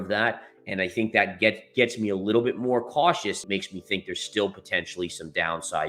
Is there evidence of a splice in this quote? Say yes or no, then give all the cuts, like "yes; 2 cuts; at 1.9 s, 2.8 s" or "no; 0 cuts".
yes; 1 cut; at 3.4 s